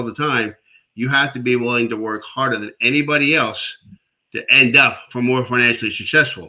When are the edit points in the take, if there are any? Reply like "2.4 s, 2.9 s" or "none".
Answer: 5.1 s